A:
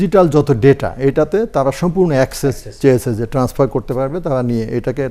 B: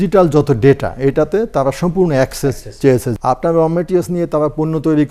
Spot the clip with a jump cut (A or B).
B